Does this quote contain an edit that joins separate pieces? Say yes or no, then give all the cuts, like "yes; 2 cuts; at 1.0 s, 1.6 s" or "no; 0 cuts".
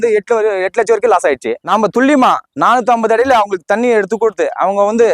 yes; 1 cut; at 1.5 s